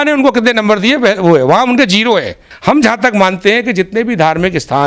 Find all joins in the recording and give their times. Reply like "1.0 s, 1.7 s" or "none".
2.5 s